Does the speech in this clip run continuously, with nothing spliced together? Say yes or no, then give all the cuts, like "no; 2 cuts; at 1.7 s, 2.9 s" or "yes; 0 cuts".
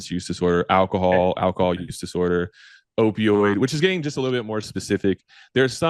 yes; 0 cuts